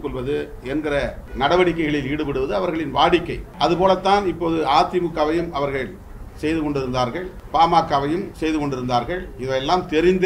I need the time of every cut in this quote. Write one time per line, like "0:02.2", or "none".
0:01.2
0:03.4
0:07.4
0:08.3